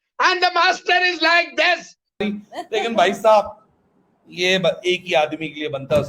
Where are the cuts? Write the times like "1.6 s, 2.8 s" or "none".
2.0 s